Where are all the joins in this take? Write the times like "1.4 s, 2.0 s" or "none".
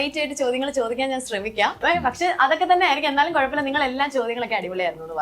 1.8 s